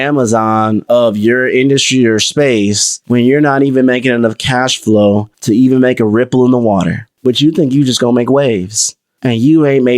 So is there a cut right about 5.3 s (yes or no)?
yes